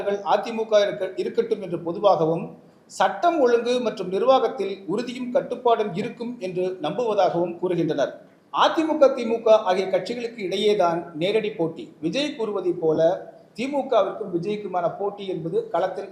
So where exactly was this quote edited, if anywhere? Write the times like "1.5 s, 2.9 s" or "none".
none